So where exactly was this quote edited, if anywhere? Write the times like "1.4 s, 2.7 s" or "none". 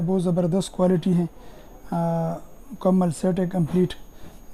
none